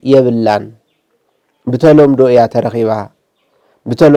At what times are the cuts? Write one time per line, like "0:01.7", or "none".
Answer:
none